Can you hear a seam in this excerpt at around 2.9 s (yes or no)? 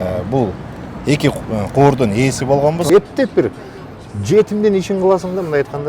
yes